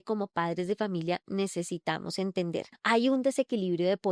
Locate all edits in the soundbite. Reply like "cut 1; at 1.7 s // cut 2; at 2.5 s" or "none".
cut 1; at 2.8 s